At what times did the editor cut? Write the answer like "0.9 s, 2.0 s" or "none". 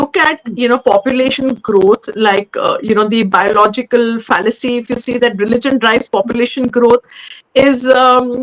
none